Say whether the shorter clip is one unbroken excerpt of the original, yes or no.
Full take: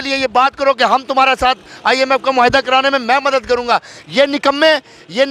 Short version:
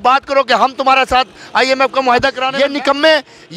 no